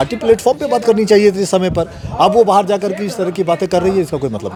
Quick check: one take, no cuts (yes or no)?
yes